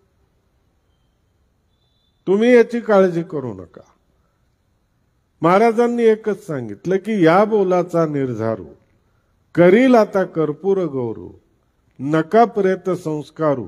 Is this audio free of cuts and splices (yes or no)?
yes